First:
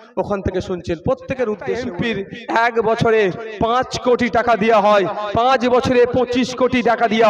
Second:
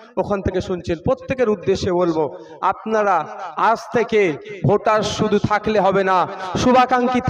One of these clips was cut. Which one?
first; 1 cut; at 1.9 s

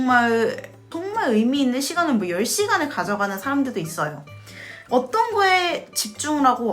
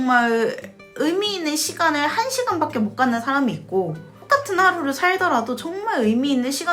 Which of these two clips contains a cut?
first; 2 cuts; at 0.9 s, 4.7 s

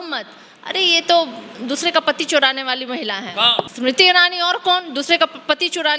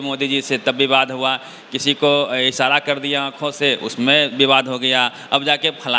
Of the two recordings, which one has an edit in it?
first; 1 cut; at 3.7 s

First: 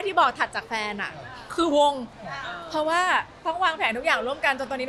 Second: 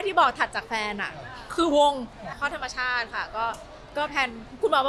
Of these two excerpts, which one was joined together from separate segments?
second; 1 cut; at 2.3 s

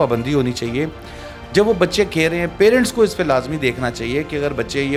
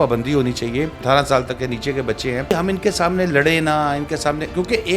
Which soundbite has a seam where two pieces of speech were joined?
second; 2 cuts; at 1.0 s, 2.5 s

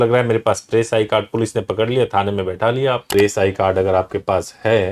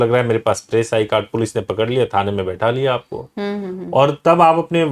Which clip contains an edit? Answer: first; 1 cut; at 3.1 s

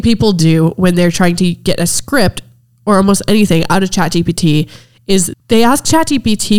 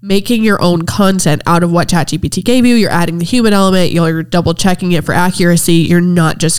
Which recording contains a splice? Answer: first; 1 cut; at 5.3 s

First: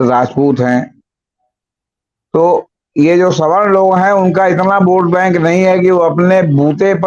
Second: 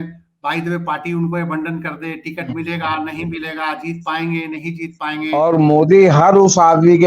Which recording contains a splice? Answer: second; 1 cut; at 5.4 s

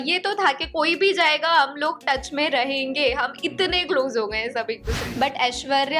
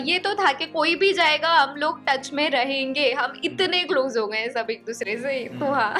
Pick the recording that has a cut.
first; 1 cut; at 5.0 s

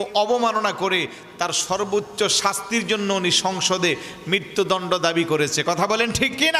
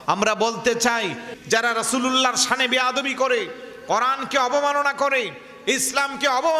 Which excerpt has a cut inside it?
second; 1 cut; at 1.3 s

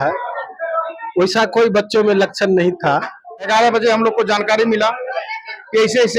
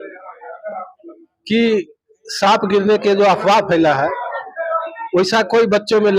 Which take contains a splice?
first; 1 cut; at 3.5 s

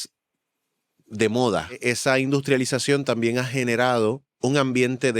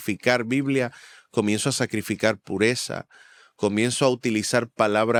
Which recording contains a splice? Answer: first; 2 cuts; at 1.8 s, 4.3 s

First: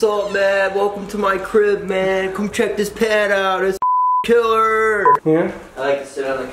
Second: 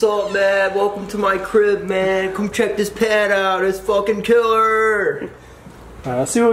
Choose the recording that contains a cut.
first; 1 cut; at 5.2 s

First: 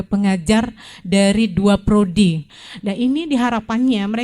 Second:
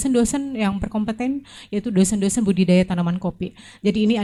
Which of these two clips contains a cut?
first; 1 cut; at 2.5 s

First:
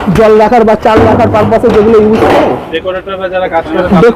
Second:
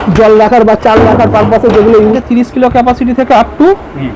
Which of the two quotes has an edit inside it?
second; 1 cut; at 2.2 s

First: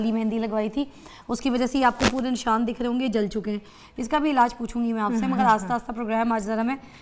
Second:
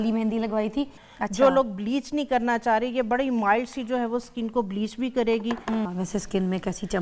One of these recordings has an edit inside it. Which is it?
second; 2 cuts; at 1.1 s, 5.9 s

